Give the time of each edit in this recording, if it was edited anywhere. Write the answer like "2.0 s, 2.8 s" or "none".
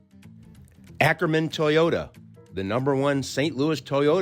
0.9 s